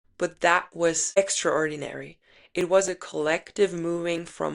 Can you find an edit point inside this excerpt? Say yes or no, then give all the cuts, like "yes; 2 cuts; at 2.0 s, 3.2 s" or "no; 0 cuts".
yes; 1 cut; at 1.2 s